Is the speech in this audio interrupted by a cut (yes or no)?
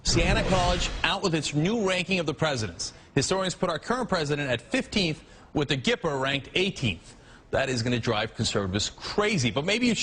yes